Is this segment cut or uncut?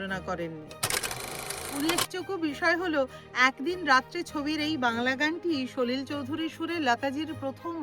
cut